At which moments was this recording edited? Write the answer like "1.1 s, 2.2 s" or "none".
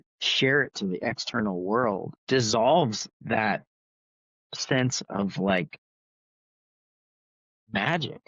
2.1 s